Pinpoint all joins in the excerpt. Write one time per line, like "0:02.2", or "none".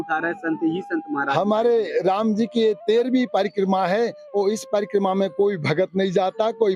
none

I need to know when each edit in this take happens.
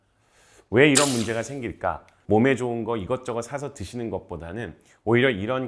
0:02.1

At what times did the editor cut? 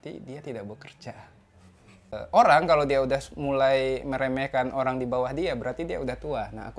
0:02.1

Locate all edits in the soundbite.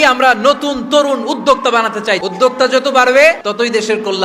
0:02.2
0:03.4

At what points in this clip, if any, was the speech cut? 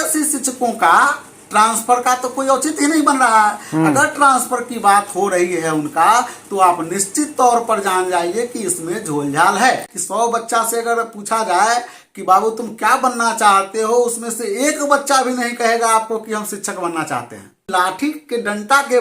0:09.9
0:17.6

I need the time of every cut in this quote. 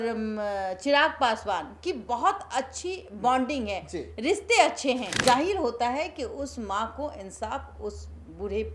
0:05.1

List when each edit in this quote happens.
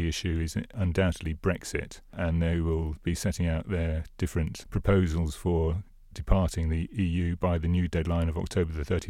0:00.8
0:02.2
0:04.6
0:06.9

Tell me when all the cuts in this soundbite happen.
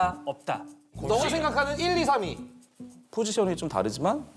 none

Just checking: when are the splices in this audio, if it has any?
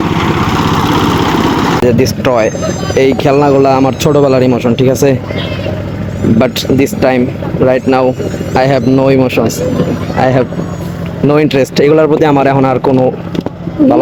none

